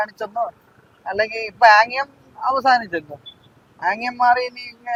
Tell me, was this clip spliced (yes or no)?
no